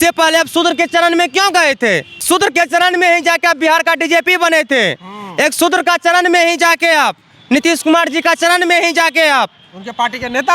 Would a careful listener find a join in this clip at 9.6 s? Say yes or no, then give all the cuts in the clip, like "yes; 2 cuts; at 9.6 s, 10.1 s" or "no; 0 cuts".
no; 1 cut; at 2.2 s